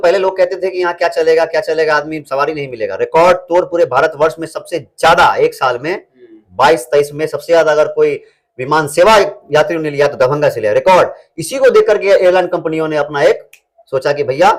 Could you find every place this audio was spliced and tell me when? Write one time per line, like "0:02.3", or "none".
none